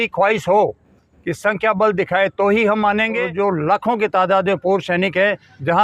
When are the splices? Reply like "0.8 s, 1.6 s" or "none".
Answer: 3.3 s